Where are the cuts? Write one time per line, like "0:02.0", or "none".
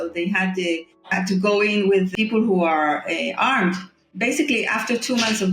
0:01.0
0:02.1
0:04.1